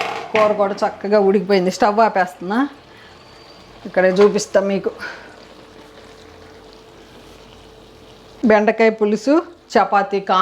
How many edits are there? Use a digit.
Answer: 1